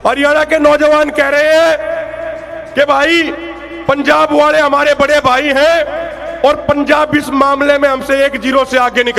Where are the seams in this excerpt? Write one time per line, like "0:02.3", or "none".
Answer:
none